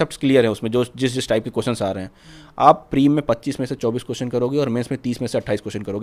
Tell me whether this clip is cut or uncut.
uncut